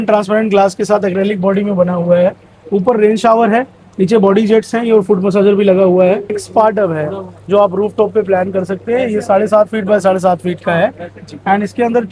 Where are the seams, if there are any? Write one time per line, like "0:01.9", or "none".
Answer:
0:06.4